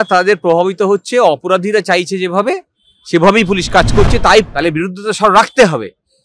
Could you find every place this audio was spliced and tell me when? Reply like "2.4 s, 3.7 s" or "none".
4.5 s